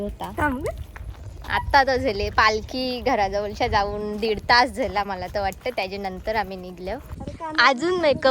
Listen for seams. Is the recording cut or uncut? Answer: cut